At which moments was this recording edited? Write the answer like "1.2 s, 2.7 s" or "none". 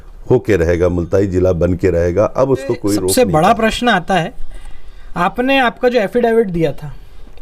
3.1 s